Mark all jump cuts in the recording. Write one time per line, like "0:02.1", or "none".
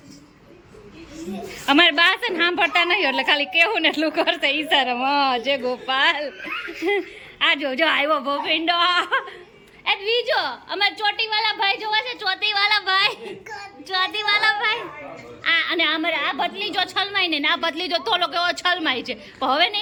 none

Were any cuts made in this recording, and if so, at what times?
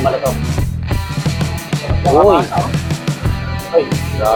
none

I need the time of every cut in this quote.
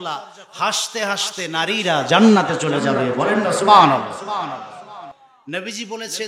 0:05.1

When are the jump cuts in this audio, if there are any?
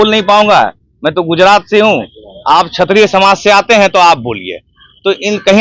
none

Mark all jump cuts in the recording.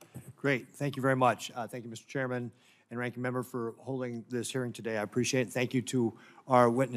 0:03.9

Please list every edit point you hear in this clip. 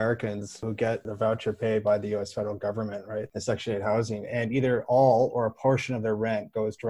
0:00.9
0:03.3

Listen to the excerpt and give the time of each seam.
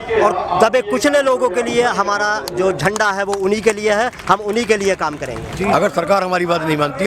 0:05.4

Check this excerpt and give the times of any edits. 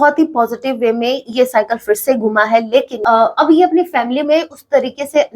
0:02.9

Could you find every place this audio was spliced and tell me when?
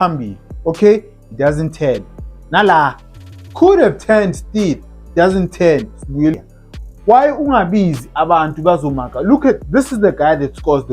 0:06.3

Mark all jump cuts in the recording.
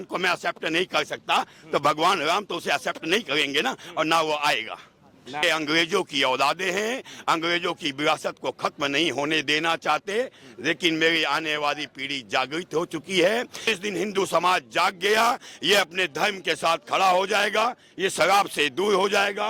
0:05.4
0:13.6

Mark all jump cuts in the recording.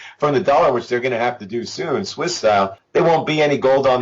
0:02.8

